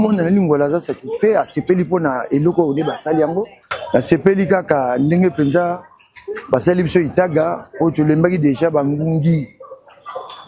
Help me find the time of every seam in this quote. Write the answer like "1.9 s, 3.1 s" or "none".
3.7 s